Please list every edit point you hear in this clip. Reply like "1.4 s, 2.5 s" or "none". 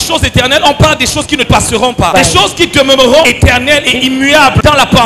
2.1 s